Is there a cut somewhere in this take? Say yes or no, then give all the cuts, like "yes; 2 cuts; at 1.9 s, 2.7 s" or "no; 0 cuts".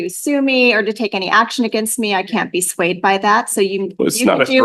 no; 0 cuts